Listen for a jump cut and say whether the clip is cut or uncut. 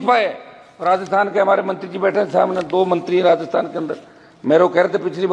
uncut